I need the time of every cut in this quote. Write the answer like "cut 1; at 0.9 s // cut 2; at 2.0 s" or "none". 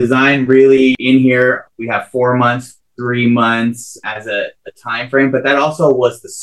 cut 1; at 1.0 s // cut 2; at 1.7 s // cut 3; at 4.0 s